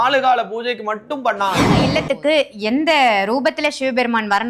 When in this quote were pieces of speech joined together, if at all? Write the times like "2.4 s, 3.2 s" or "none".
1.8 s